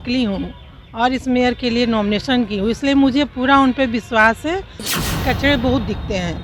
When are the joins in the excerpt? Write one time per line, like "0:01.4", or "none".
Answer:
0:04.9